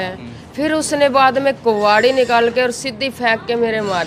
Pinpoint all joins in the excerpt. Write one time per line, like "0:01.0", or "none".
none